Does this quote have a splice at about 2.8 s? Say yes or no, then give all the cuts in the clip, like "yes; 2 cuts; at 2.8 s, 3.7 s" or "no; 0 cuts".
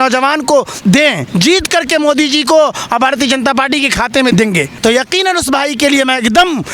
no; 2 cuts; at 1.2 s, 4.4 s